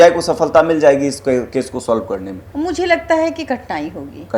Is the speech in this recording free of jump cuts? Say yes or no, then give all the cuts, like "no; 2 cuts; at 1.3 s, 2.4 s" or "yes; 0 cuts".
no; 1 cut; at 2.4 s